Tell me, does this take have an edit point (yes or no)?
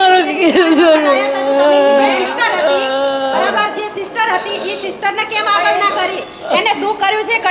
no